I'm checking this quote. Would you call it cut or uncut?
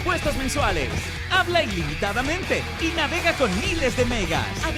uncut